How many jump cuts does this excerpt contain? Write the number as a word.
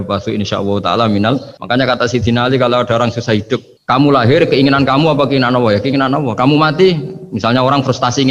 two